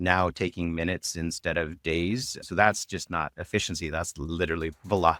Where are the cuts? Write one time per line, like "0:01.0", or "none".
none